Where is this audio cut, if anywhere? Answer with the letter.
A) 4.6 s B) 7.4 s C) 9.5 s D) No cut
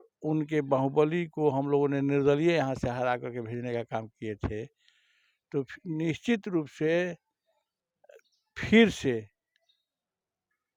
D